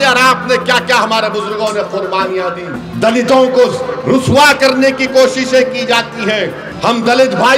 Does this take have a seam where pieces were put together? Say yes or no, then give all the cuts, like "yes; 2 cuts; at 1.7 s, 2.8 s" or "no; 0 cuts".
yes; 2 cuts; at 2.8 s, 6.6 s